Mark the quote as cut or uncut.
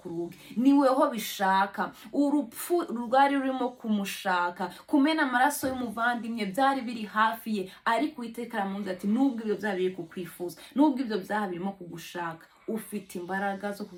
uncut